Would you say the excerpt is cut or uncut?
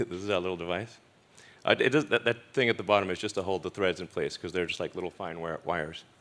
uncut